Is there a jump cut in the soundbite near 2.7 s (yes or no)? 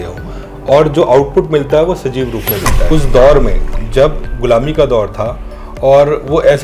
yes